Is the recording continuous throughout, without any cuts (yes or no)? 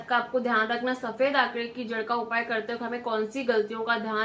yes